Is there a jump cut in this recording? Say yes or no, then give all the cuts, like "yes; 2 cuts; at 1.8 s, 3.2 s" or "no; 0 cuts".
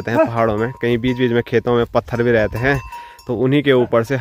no; 0 cuts